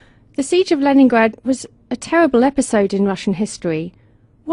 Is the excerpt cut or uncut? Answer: cut